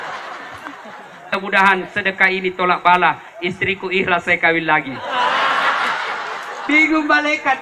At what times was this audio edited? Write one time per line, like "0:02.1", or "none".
0:01.4